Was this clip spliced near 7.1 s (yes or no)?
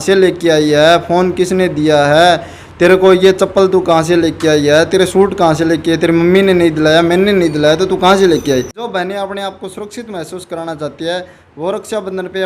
no